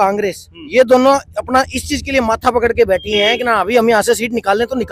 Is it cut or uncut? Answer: uncut